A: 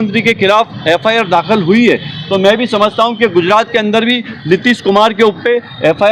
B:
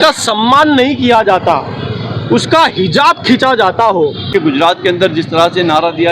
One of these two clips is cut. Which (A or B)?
B